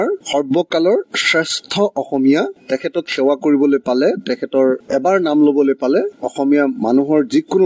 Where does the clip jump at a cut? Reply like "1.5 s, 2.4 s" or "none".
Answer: none